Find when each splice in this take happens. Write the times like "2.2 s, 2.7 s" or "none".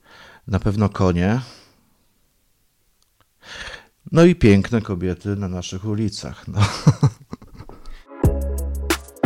8.1 s